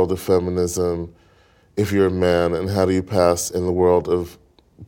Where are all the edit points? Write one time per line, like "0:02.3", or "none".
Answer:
none